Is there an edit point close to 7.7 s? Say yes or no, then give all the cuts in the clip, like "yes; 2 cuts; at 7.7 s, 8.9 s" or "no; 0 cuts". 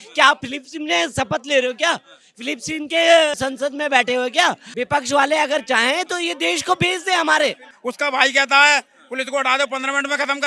yes; 2 cuts; at 4.7 s, 7.7 s